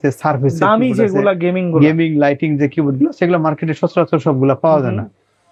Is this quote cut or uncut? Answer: uncut